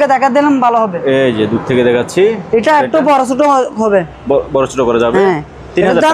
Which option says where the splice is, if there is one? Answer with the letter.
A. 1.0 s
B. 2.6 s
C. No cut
C